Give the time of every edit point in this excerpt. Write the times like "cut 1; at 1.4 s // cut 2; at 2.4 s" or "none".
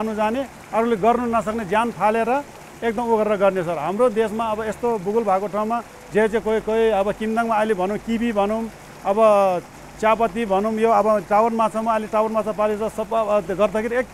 none